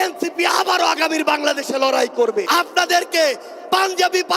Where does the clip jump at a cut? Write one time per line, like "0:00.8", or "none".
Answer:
0:02.5